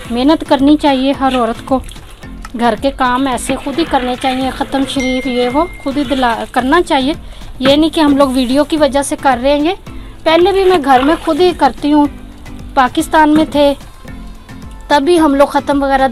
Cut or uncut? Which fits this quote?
uncut